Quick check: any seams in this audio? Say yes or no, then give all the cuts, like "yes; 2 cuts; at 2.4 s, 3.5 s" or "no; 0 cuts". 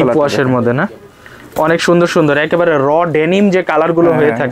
no; 0 cuts